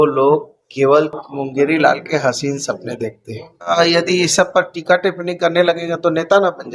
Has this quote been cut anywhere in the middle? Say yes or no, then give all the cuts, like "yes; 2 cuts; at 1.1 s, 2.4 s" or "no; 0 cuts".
yes; 1 cut; at 3.7 s